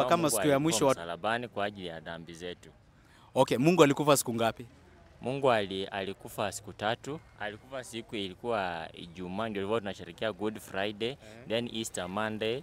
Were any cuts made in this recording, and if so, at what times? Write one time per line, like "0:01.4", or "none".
0:01.0

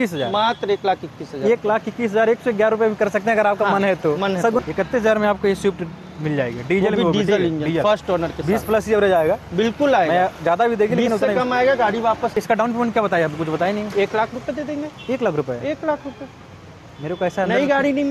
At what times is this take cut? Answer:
0:04.6
0:12.4

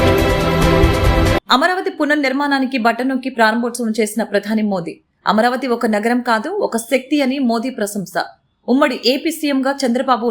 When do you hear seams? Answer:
0:01.4

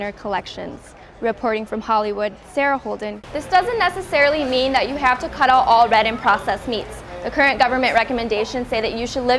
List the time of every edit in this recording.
0:03.3

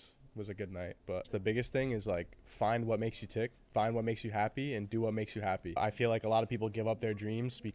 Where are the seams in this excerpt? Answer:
0:01.3
0:03.6
0:05.8

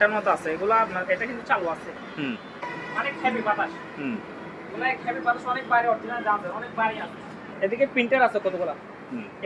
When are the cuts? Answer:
0:02.7
0:07.5

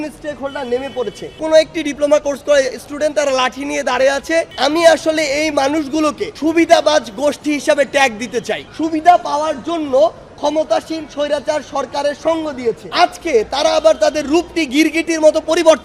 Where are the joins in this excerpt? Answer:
0:01.3
0:04.5
0:06.3
0:08.6
0:12.8

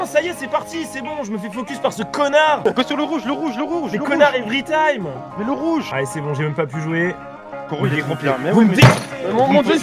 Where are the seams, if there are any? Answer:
0:02.6
0:05.9

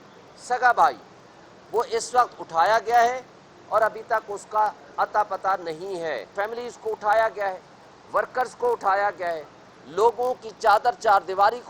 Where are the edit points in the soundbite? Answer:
0:06.3

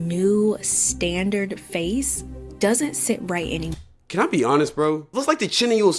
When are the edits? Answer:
0:05.1

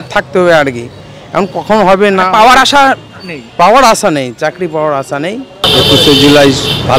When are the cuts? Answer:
0:05.7

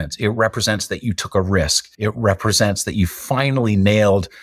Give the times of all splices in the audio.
0:01.8

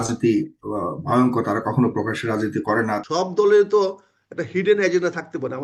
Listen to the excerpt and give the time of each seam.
0:03.0

